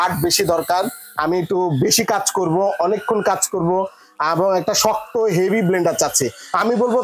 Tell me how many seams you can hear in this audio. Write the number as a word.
zero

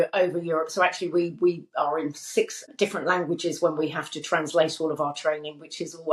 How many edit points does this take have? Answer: one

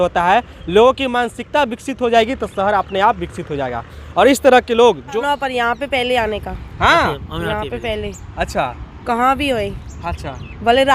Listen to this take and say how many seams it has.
one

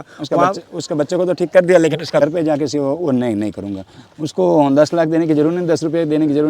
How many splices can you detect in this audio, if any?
one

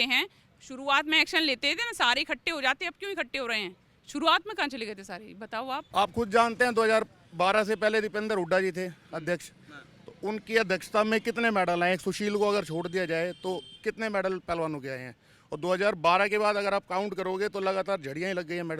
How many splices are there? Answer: one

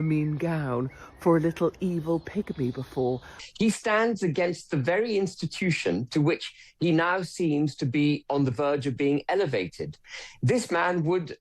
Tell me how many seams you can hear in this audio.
one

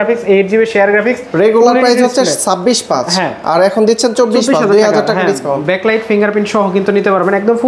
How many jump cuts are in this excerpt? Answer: one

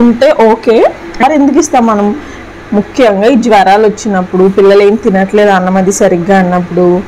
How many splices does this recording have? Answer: one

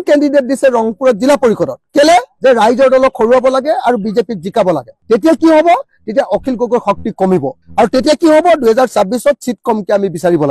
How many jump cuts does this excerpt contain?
zero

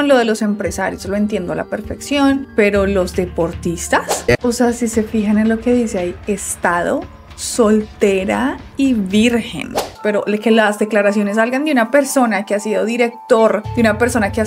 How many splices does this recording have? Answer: two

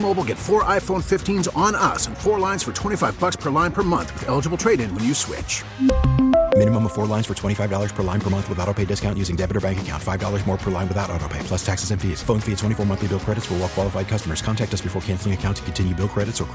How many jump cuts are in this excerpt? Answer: zero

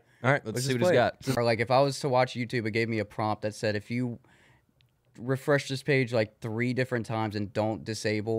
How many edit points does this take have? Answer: one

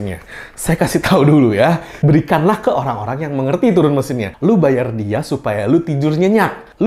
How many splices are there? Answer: zero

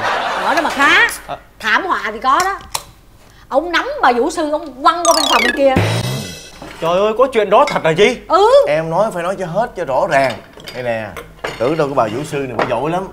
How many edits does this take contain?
zero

